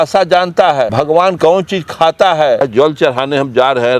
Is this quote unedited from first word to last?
no; 2 cuts; at 1.3 s, 2.6 s

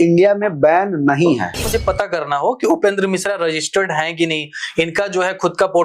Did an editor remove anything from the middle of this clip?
yes; 1 cut; at 1.6 s

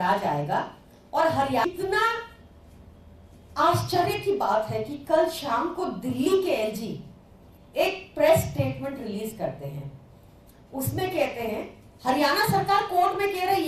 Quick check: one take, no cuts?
no; 1 cut; at 1.6 s

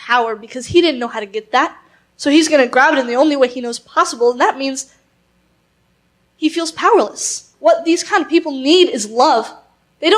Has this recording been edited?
yes; 1 cut; at 7.5 s

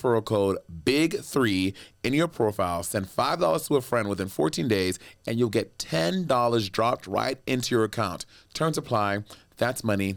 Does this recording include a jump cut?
no; 0 cuts

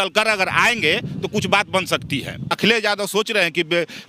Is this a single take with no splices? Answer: no; 1 cut; at 2.5 s

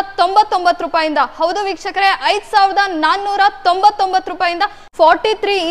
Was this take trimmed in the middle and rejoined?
yes; 1 cut; at 4.8 s

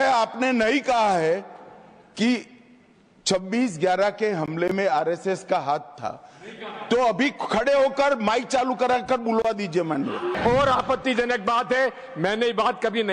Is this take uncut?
no; 1 cut; at 10.3 s

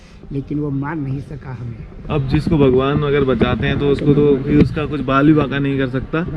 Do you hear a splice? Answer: no; 0 cuts

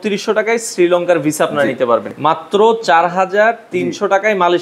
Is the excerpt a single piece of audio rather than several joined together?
no; 1 cut; at 2.1 s

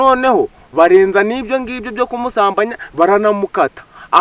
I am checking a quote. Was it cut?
no; 0 cuts

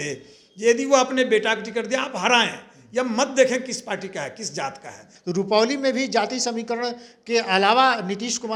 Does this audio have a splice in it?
yes; 1 cut; at 5.1 s

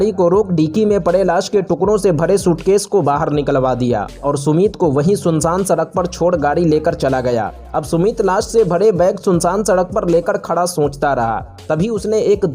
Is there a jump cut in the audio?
no; 0 cuts

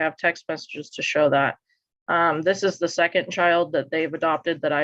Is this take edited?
no; 0 cuts

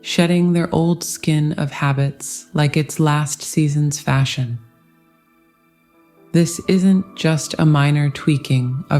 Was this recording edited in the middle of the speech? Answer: yes; 2 cuts; at 4.6 s, 6.3 s

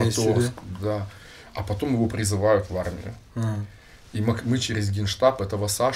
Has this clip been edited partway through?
no; 0 cuts

